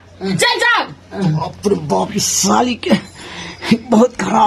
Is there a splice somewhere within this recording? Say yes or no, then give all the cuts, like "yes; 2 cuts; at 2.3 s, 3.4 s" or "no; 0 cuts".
no; 0 cuts